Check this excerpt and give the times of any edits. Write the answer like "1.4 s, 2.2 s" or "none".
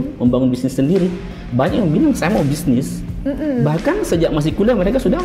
none